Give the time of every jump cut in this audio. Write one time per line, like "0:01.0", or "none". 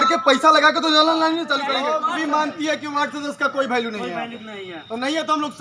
0:01.6